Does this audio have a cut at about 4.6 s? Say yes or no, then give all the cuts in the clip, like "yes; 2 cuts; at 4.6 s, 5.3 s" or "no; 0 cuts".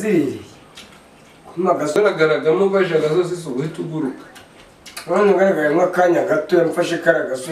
no; 1 cut; at 2.0 s